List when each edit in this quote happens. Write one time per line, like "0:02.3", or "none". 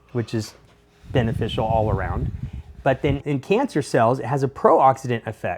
0:03.2